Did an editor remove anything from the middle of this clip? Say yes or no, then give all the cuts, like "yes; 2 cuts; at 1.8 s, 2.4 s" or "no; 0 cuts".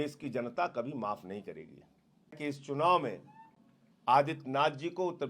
yes; 1 cut; at 2.4 s